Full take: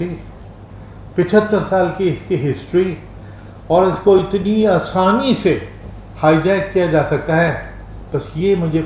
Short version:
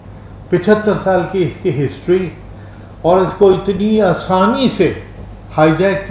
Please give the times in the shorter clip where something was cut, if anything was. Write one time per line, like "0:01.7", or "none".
none